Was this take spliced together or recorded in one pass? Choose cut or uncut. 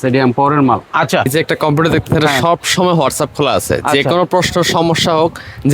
cut